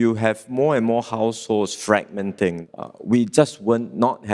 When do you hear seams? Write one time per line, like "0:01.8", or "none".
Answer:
0:02.6